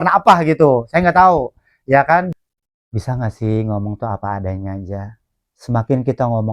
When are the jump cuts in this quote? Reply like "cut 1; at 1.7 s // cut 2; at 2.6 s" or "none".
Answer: cut 1; at 2.3 s

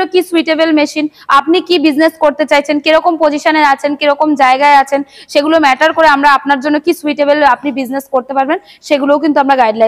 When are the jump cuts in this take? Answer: none

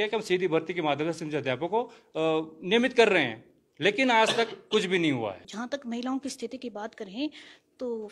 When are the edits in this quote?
cut 1; at 5.5 s

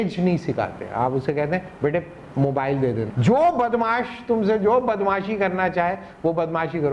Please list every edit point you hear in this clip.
cut 1; at 3.1 s

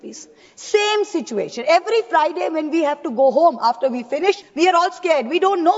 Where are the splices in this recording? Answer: cut 1; at 4.5 s

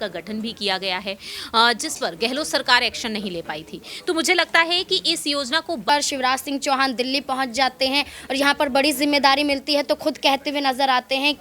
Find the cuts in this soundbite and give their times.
cut 1; at 5.9 s

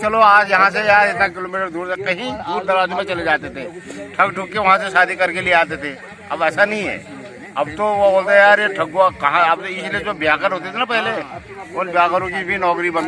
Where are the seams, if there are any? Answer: none

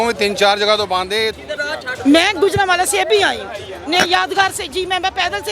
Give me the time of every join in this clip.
cut 1; at 1.3 s

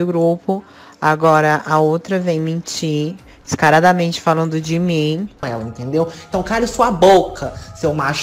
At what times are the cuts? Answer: cut 1; at 5.5 s

